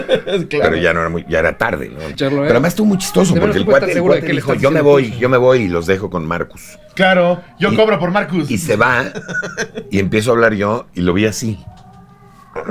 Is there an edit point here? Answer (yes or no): yes